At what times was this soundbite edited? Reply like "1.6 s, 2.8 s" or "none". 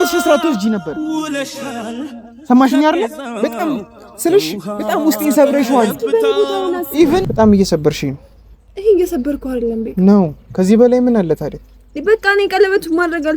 7.3 s